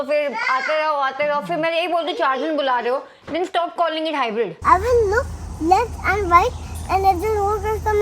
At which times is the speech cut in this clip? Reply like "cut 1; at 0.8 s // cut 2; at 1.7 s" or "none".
cut 1; at 4.6 s